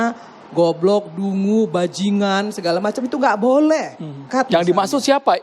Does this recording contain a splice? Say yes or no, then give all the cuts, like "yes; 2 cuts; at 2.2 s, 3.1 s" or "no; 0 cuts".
yes; 1 cut; at 4.2 s